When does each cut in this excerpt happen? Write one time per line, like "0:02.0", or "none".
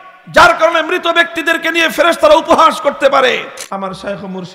0:03.6